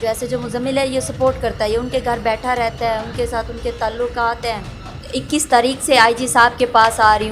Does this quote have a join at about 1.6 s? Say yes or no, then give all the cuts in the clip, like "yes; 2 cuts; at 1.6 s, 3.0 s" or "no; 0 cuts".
no; 1 cut; at 5.0 s